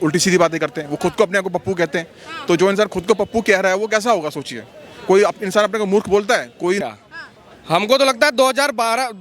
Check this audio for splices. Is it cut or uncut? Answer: cut